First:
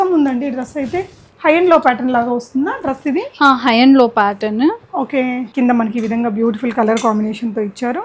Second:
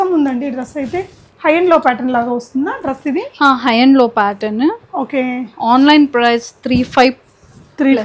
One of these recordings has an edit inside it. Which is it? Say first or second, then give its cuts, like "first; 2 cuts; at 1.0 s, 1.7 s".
first; 1 cut; at 5.5 s